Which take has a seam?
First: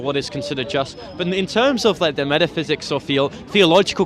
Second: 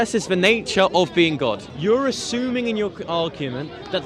second; 1 cut; at 1.7 s

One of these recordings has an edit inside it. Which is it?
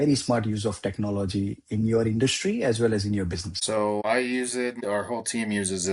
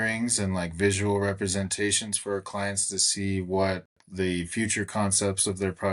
first; 2 cuts; at 3.9 s, 4.8 s

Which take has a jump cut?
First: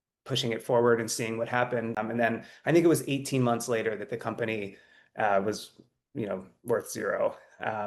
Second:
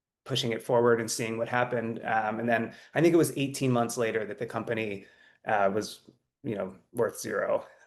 first; 1 cut; at 2.0 s

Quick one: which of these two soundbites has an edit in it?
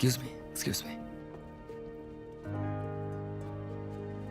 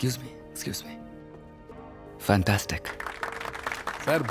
second; 1 cut; at 1.7 s

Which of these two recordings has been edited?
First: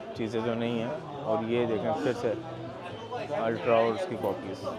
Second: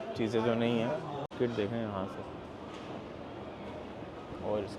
second; 1 cut; at 1.3 s

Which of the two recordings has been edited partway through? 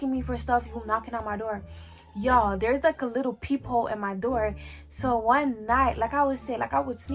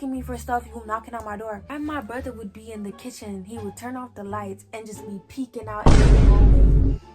second; 1 cut; at 1.7 s

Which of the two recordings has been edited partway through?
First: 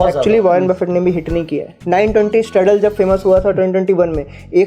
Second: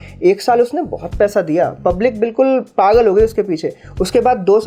first; 1 cut; at 1.7 s

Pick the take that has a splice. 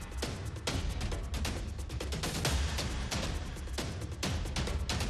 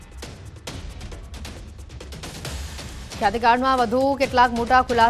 first; 1 cut; at 3.1 s

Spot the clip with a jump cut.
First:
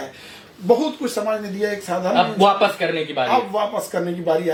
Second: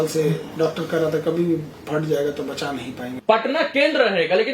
second; 1 cut; at 3.0 s

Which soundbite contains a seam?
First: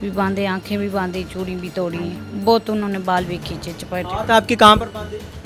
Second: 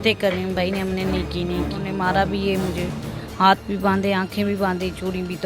second; 1 cut; at 1.8 s

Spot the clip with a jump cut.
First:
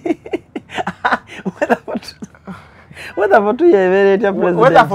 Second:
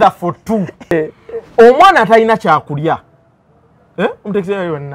second; 1 cut; at 0.9 s

